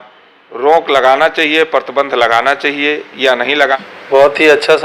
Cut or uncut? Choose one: cut